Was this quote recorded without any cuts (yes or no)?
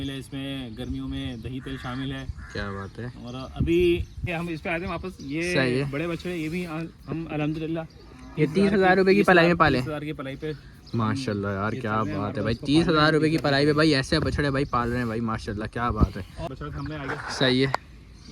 no